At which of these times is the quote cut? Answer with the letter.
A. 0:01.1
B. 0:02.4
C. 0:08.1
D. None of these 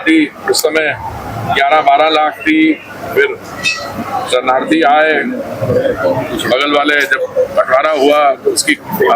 D